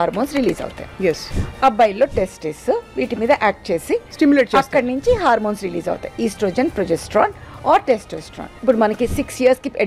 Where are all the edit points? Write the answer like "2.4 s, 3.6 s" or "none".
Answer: 1.3 s, 8.5 s